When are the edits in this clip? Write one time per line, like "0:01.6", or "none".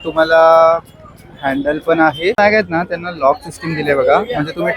0:02.3